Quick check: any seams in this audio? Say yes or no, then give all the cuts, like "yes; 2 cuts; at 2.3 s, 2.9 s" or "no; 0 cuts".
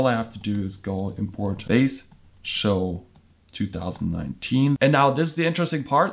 yes; 2 cuts; at 1.6 s, 4.8 s